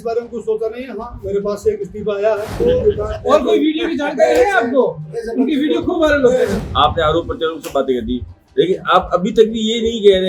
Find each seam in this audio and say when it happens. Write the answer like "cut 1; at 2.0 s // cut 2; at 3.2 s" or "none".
cut 1; at 2.6 s // cut 2; at 6.6 s